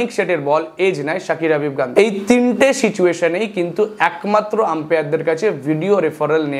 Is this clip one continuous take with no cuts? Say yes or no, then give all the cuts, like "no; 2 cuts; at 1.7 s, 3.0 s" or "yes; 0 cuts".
no; 1 cut; at 1.9 s